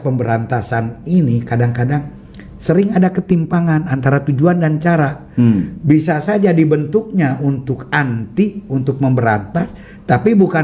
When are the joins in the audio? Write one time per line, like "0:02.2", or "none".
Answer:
none